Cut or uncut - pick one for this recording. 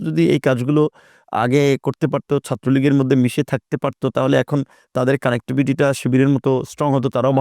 uncut